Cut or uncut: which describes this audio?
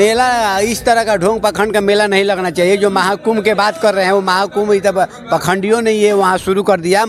uncut